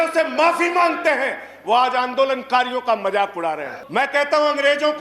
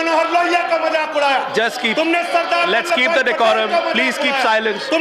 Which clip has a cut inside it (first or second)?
first